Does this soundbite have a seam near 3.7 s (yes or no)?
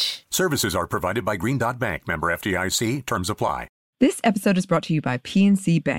yes